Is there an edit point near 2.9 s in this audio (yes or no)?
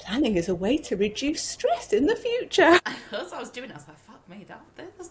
yes